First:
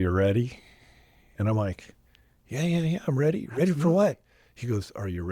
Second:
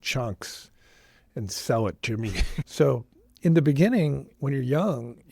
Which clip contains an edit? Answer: second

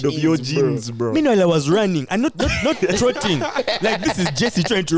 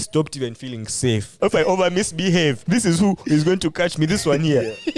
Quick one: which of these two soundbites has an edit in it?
second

